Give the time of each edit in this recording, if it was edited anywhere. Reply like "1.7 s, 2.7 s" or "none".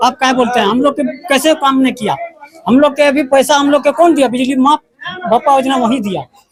none

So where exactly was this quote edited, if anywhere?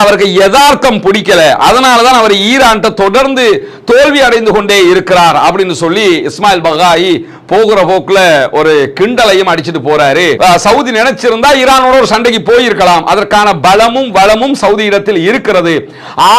10.4 s

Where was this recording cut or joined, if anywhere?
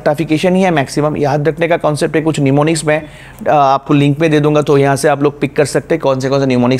none

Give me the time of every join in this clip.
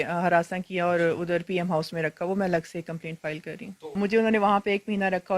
4.0 s

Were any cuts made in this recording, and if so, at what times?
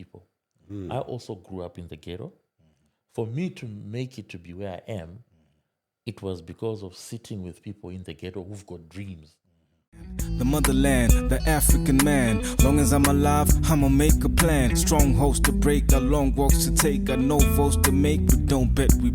9.8 s

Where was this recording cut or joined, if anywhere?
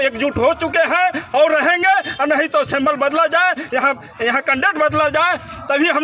none

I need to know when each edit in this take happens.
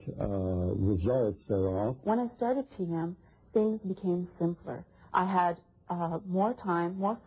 2.0 s

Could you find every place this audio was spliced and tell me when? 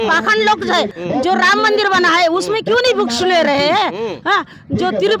1.0 s

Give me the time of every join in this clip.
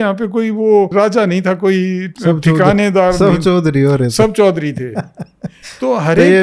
0.9 s, 2.1 s

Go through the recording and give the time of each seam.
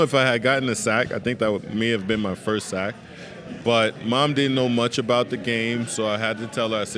3.6 s

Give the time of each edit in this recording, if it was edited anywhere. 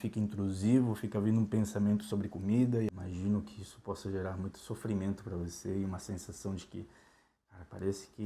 2.9 s

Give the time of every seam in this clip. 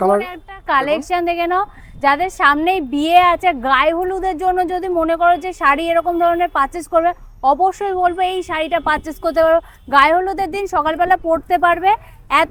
none

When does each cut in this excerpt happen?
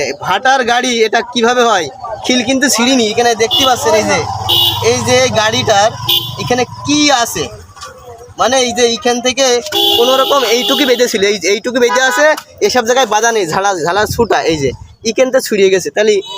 none

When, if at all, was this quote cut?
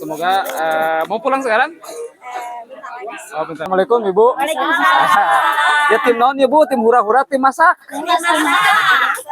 3.7 s

